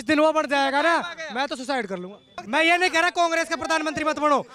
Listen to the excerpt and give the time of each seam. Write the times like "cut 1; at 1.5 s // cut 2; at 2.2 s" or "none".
cut 1; at 2.3 s